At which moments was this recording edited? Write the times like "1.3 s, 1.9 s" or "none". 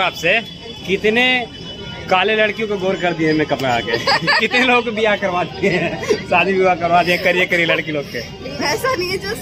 none